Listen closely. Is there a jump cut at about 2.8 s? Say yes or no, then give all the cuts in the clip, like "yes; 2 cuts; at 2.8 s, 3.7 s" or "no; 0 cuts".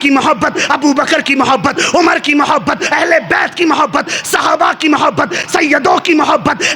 yes; 1 cut; at 2.8 s